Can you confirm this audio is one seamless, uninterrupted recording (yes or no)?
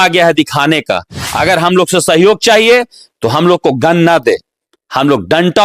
no